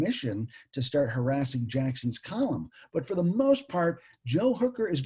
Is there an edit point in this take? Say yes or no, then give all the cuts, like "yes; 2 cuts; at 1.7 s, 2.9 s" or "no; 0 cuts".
no; 0 cuts